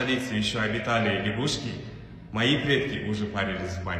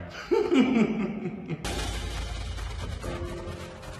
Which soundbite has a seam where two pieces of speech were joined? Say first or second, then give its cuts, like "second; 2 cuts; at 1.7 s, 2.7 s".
second; 1 cut; at 1.6 s